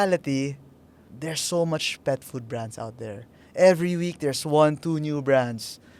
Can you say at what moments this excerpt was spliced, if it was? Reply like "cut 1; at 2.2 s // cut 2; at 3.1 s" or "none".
cut 1; at 1.1 s